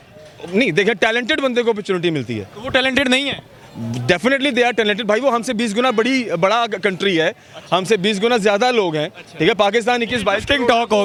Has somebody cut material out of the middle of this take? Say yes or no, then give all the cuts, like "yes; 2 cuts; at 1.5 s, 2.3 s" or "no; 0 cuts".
no; 0 cuts